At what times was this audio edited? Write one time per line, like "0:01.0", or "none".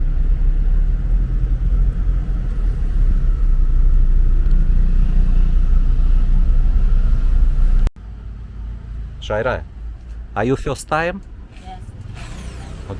none